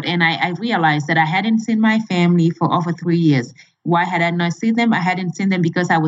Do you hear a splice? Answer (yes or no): no